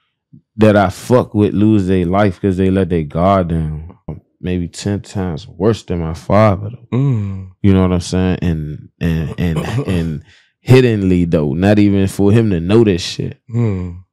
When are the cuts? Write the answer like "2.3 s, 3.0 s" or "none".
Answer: 4.1 s